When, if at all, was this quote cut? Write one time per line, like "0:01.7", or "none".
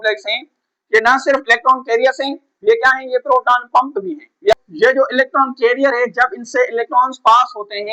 0:04.5